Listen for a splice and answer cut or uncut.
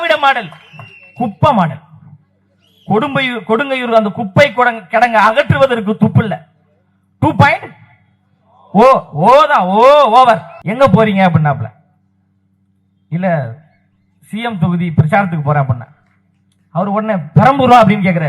cut